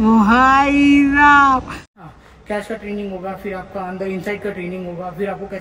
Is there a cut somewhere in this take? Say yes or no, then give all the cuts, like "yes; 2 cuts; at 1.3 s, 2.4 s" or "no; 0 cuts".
yes; 1 cut; at 1.9 s